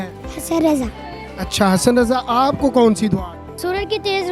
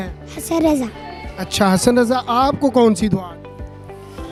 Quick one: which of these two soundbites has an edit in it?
first; 1 cut; at 3.4 s

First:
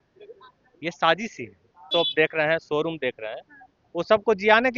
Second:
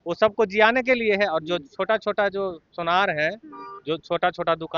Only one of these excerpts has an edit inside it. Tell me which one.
first; 1 cut; at 1.9 s

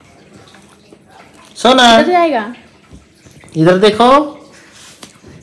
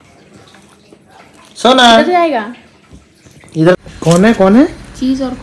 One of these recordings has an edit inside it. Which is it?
second; 1 cut; at 3.8 s

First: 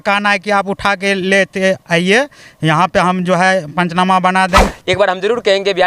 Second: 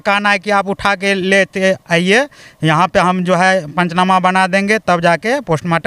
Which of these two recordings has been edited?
first; 1 cut; at 4.6 s

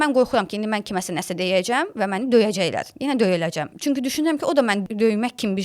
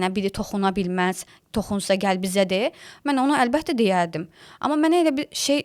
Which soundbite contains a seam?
first; 2 cuts; at 3.7 s, 4.8 s

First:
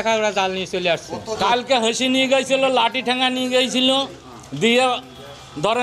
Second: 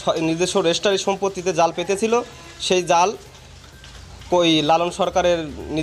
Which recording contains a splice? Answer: first; 1 cut; at 1.3 s

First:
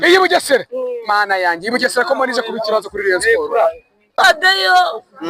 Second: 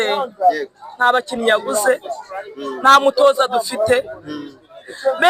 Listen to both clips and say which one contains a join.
first; 1 cut; at 4.1 s

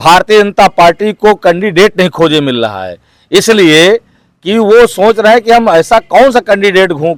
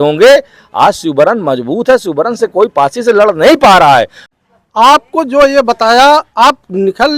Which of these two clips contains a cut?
second; 1 cut; at 4.2 s

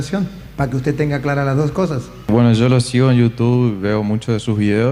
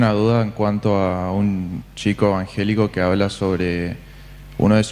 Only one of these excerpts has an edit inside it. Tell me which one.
first; 1 cut; at 2.3 s

